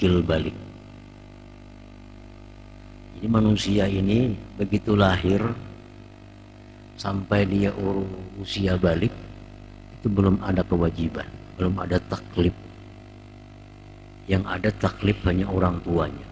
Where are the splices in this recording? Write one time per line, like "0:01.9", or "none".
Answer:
none